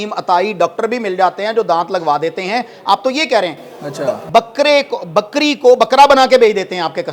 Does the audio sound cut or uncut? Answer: uncut